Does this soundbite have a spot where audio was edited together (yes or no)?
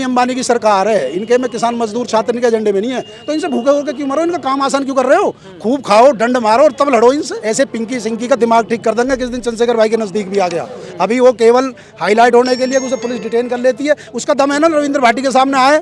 yes